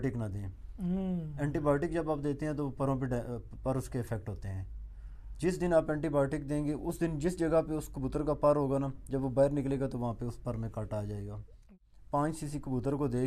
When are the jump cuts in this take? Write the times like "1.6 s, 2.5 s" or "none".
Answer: 11.6 s